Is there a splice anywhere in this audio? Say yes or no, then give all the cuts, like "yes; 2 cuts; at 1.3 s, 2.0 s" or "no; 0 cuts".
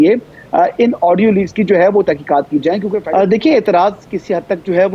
yes; 1 cut; at 3.0 s